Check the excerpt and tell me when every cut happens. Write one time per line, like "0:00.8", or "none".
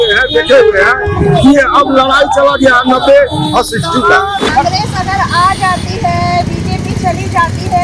0:04.5